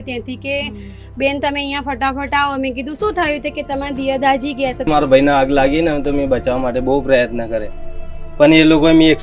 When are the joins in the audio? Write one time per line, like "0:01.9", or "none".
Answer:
0:04.9

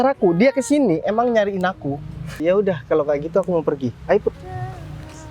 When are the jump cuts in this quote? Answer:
0:02.4

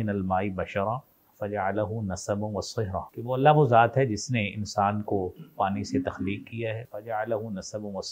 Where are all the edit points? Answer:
0:03.1
0:06.9

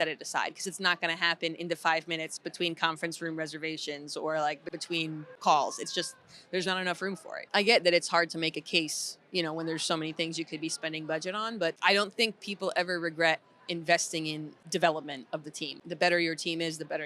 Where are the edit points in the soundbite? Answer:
0:04.8
0:07.4
0:11.8
0:14.5
0:15.8

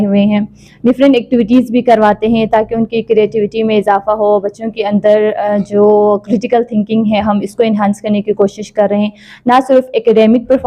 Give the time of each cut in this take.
none

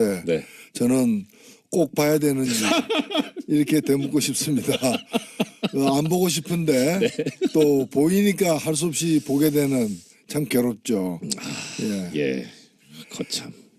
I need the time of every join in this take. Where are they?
0:09.9

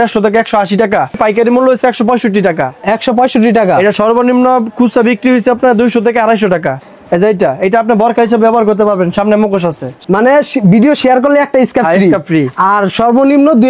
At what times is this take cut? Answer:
0:01.2
0:06.7
0:10.0

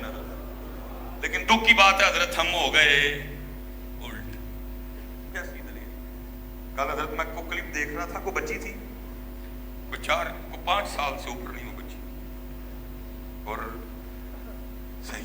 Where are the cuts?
0:05.3

